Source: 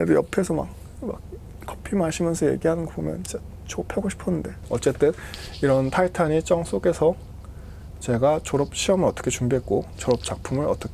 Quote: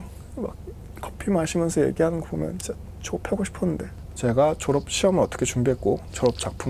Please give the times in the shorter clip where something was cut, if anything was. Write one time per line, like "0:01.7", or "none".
0:03.9